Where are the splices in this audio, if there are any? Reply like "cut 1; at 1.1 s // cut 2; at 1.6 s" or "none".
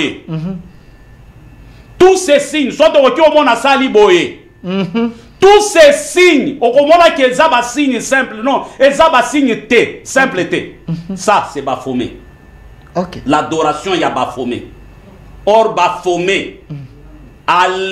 none

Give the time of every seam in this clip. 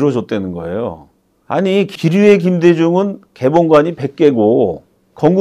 cut 1; at 1.9 s

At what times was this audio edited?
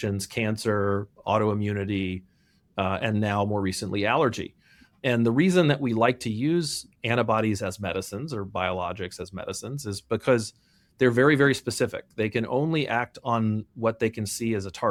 none

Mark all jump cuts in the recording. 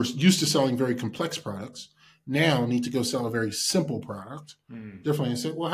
none

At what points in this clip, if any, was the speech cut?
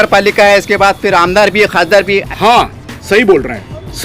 cut 1; at 2.3 s

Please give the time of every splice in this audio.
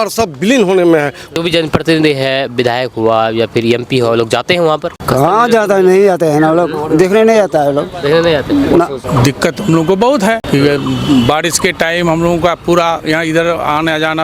cut 1; at 1.3 s // cut 2; at 4.9 s // cut 3; at 9.0 s // cut 4; at 10.4 s

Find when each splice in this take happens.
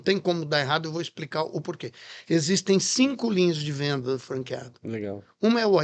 none

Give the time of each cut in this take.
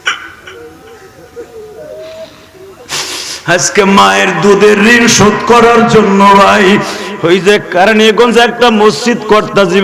none

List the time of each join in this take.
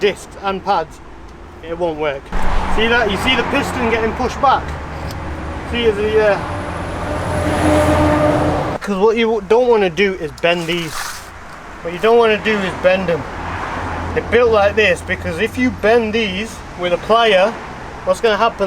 cut 1; at 2.3 s // cut 2; at 8.8 s

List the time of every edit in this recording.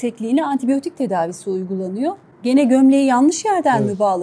cut 1; at 2.3 s

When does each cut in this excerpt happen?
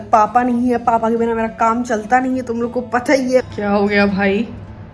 cut 1; at 3.5 s

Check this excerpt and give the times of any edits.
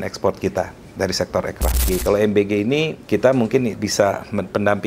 cut 1; at 1.9 s // cut 2; at 3.0 s // cut 3; at 3.8 s

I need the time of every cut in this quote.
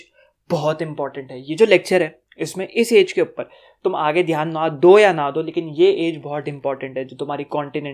none

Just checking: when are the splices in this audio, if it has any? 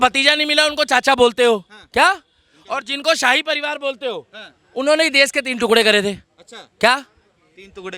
none

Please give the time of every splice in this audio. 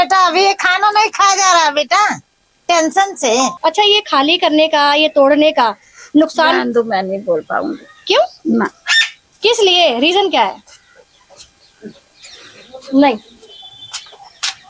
cut 1; at 3.5 s

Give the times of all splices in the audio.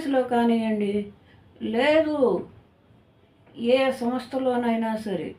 none

